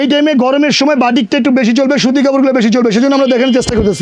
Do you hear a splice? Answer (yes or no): no